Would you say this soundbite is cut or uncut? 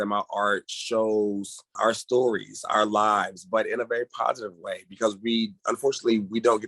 cut